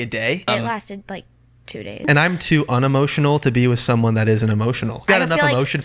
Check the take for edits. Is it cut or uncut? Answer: cut